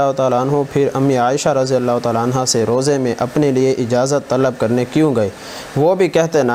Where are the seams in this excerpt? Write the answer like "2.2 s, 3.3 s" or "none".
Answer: none

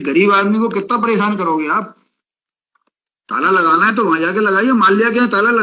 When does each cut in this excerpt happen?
none

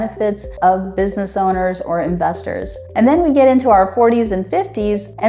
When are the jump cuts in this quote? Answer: none

